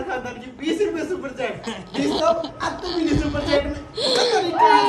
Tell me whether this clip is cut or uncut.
uncut